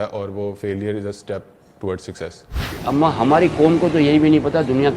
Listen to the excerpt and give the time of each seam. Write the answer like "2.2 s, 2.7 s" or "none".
2.8 s